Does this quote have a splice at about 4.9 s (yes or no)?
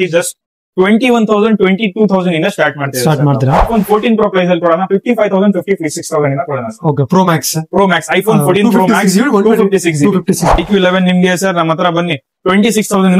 no